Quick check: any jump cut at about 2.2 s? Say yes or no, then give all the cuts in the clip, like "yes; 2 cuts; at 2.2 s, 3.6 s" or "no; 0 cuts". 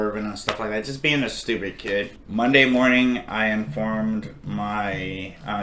yes; 1 cut; at 2.2 s